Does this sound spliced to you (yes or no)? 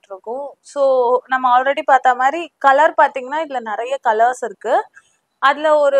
no